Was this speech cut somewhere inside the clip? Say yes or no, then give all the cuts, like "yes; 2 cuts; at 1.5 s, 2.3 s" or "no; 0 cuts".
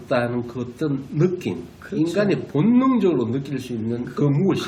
no; 0 cuts